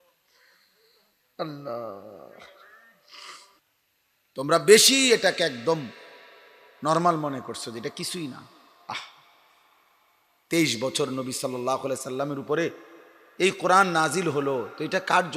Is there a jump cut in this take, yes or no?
yes